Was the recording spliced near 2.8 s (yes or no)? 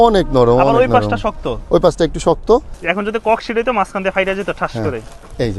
yes